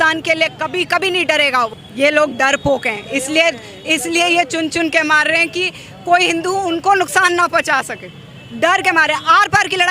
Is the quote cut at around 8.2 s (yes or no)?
no